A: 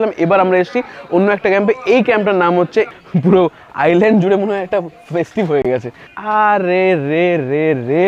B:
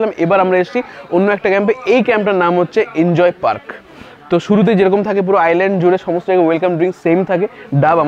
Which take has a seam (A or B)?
A